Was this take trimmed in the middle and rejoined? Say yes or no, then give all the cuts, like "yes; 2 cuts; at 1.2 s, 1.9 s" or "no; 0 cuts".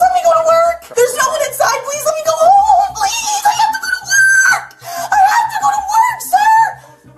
no; 0 cuts